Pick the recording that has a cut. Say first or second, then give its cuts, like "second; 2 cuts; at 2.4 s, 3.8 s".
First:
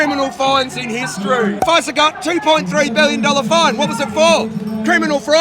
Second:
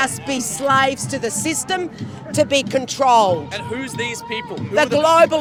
first; 1 cut; at 1.6 s